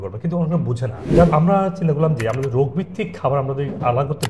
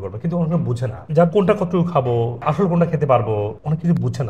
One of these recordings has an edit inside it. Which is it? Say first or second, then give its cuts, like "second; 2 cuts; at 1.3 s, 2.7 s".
first; 1 cut; at 1.3 s